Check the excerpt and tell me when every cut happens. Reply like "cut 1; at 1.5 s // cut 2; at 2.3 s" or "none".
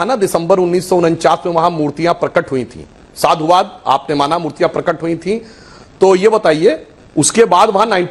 none